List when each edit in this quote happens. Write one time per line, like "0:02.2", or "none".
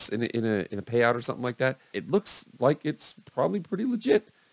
0:02.0